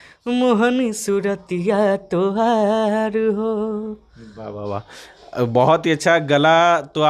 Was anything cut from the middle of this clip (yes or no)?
no